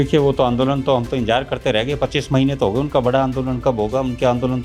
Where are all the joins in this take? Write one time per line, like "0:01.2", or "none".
none